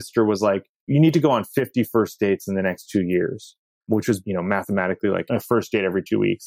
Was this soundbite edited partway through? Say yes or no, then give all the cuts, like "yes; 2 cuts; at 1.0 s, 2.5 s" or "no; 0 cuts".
yes; 3 cuts; at 0.9 s, 3.9 s, 5.2 s